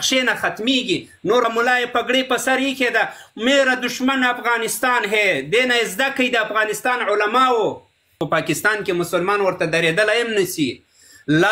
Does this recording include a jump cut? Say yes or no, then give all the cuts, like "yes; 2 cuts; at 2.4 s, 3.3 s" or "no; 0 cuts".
yes; 2 cuts; at 1.4 s, 8.2 s